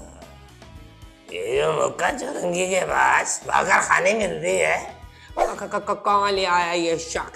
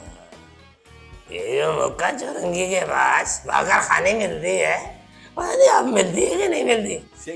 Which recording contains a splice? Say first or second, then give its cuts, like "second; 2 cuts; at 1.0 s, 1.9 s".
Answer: first; 1 cut; at 5.5 s